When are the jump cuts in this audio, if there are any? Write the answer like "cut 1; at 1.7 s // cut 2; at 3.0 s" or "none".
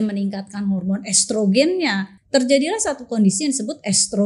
cut 1; at 2.1 s